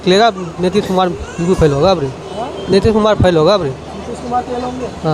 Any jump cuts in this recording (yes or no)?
no